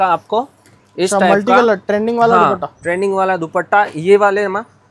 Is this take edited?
no; 0 cuts

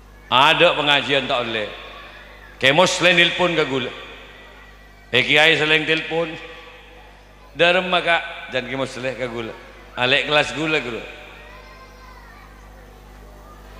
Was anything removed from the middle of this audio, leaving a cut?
no; 0 cuts

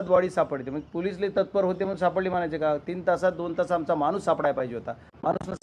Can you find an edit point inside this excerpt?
no; 0 cuts

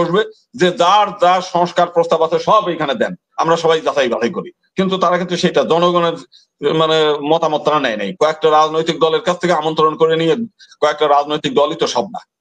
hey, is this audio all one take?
yes; 0 cuts

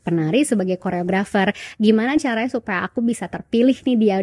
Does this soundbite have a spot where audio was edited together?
no; 0 cuts

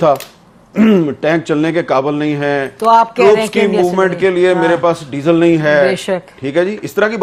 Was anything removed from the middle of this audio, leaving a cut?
no; 0 cuts

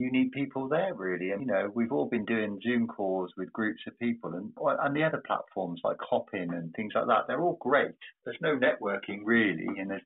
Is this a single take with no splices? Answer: no; 1 cut; at 1.4 s

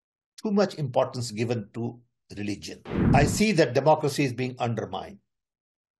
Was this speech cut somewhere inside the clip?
yes; 1 cut; at 2.9 s

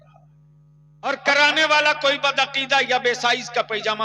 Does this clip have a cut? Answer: yes; 1 cut; at 1.2 s

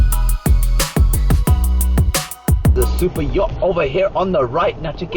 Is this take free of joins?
no; 1 cut; at 2.7 s

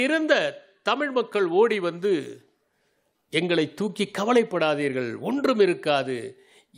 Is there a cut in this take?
no; 0 cuts

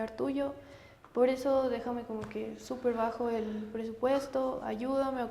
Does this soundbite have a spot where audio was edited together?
no; 0 cuts

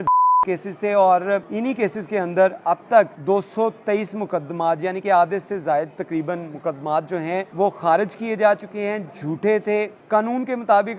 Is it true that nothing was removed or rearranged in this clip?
no; 4 cuts; at 1.5 s, 3.2 s, 7.5 s, 10.0 s

